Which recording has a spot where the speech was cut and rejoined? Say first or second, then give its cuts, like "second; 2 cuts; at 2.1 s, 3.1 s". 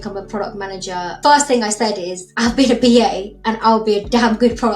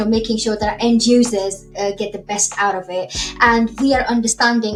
first; 2 cuts; at 1.2 s, 2.3 s